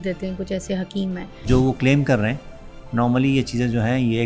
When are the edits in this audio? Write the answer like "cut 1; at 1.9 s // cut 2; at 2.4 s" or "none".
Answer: cut 1; at 1.5 s